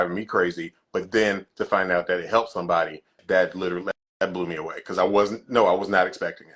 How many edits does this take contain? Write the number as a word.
one